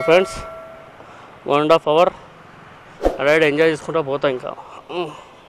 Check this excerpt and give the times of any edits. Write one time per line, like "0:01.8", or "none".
none